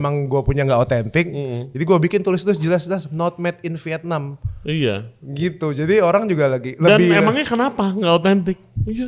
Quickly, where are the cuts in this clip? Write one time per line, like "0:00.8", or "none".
none